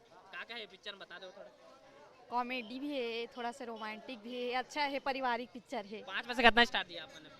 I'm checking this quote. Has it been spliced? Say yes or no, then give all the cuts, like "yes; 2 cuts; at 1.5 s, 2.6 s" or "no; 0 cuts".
no; 0 cuts